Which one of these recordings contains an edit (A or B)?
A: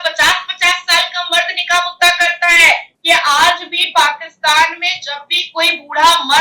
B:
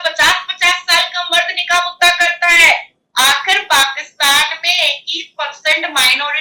A